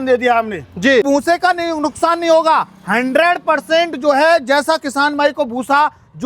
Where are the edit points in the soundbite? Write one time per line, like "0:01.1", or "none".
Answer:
0:01.1